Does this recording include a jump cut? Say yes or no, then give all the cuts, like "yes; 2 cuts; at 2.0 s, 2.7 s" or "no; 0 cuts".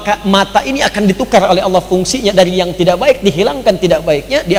no; 0 cuts